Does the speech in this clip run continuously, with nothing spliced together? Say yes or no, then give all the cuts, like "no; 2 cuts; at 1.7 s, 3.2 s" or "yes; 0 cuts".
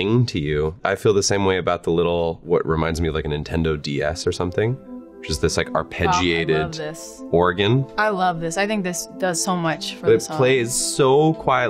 no; 2 cuts; at 2.4 s, 7.9 s